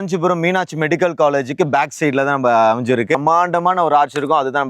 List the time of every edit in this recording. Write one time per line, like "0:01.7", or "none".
0:03.2